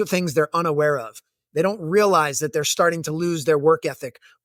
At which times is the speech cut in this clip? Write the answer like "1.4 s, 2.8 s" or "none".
none